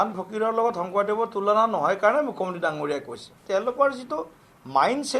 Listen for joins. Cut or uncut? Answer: cut